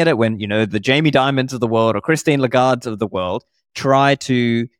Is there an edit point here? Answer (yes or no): no